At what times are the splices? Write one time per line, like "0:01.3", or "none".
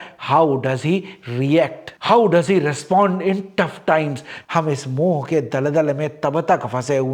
0:04.3